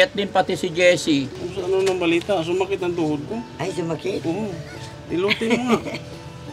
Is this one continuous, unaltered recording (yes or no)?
no